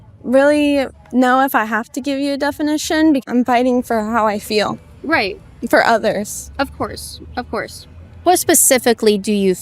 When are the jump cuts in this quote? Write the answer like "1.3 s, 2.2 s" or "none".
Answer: 3.2 s